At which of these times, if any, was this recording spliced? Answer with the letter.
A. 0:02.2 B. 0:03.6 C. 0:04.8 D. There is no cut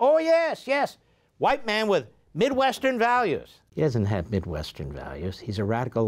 B